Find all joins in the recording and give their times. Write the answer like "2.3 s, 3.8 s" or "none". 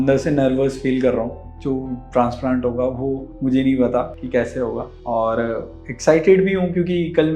1.5 s